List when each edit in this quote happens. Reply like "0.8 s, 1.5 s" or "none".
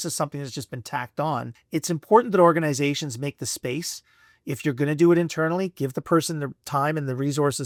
none